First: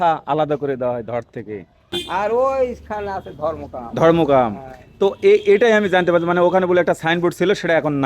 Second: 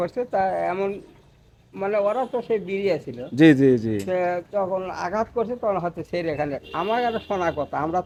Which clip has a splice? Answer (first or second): first